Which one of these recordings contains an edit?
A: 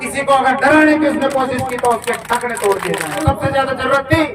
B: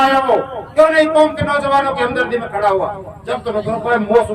A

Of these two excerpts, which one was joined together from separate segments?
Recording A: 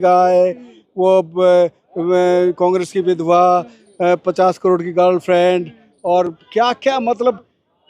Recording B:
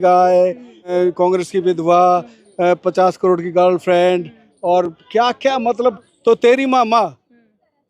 B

